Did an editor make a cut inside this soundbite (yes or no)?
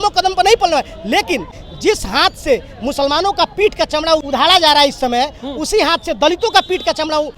yes